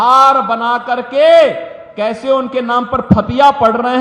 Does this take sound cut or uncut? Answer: uncut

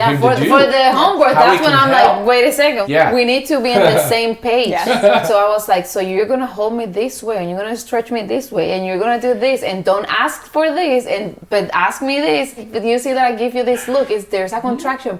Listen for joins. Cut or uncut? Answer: cut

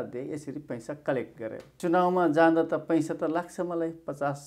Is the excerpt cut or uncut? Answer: cut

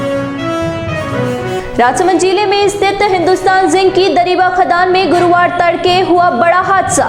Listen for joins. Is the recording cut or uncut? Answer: uncut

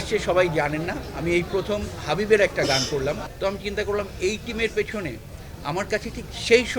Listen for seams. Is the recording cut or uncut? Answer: cut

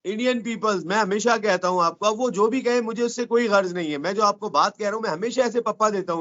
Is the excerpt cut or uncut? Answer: uncut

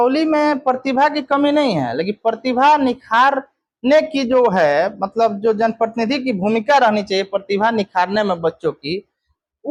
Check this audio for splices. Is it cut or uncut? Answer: uncut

